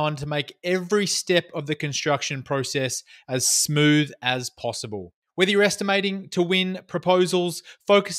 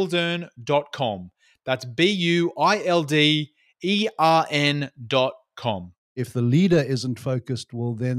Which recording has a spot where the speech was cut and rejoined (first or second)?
second